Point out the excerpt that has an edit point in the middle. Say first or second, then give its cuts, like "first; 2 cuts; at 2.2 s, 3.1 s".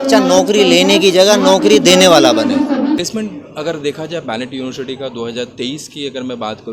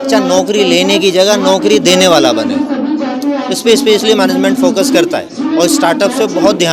first; 1 cut; at 3.0 s